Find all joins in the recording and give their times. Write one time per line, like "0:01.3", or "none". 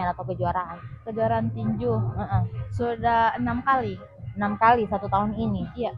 none